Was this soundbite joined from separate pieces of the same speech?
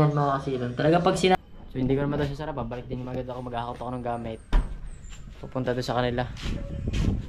yes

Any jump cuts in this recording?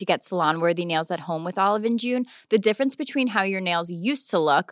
no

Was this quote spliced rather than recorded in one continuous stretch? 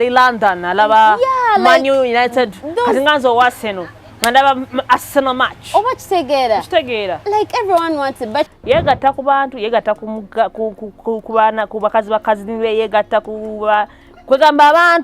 yes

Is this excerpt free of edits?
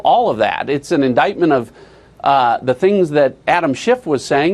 yes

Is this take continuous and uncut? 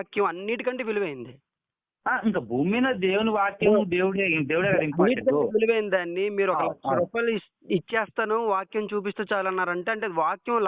yes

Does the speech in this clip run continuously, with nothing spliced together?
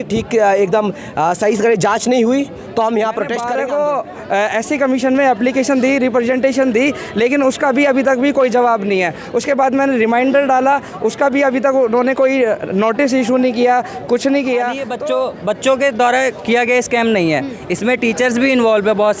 no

